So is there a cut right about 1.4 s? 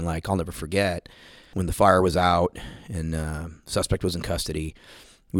yes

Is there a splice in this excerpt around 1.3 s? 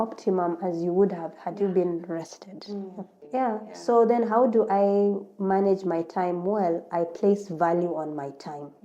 no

